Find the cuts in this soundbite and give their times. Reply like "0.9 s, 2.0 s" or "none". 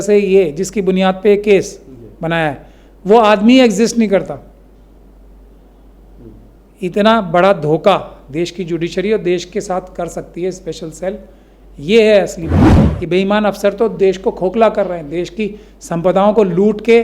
12.8 s